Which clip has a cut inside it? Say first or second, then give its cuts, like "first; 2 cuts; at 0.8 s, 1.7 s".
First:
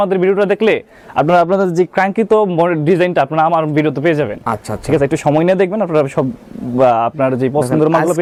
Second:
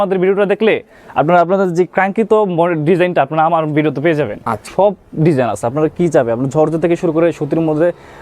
second; 1 cut; at 4.7 s